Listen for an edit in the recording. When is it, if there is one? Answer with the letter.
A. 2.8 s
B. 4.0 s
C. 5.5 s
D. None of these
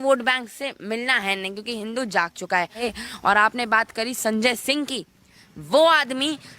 A